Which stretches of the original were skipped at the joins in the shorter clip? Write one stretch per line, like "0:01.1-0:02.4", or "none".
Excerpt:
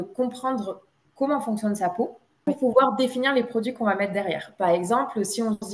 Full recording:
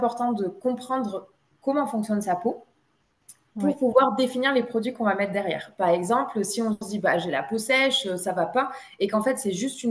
0:02.9-0:03.7